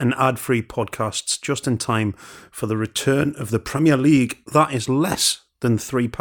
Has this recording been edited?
no; 0 cuts

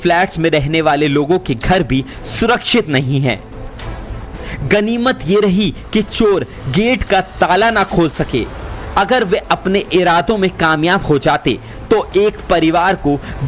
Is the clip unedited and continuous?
yes; 0 cuts

